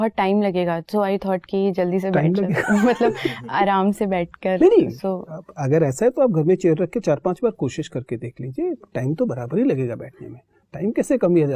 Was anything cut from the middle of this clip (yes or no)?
no